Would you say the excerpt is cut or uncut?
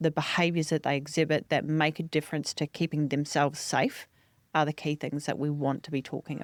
uncut